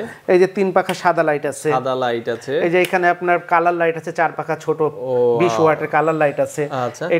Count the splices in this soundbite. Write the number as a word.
zero